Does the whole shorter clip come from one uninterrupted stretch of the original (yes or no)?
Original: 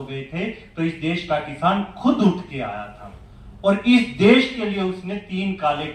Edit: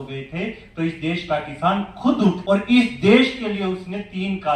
no